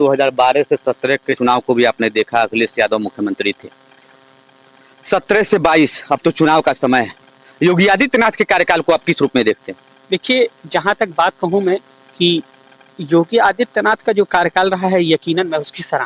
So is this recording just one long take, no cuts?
no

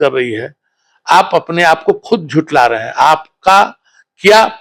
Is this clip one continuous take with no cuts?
yes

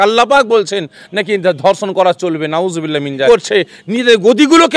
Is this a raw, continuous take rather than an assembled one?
no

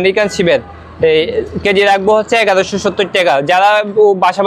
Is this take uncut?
yes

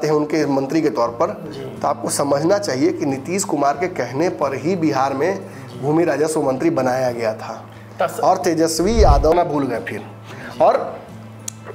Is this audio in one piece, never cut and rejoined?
no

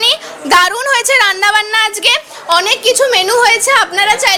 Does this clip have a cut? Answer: no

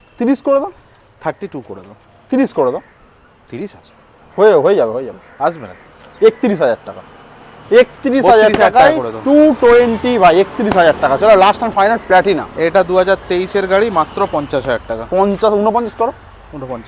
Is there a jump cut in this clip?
no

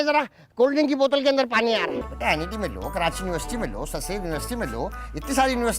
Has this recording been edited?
yes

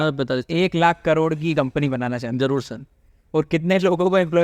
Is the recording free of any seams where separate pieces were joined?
yes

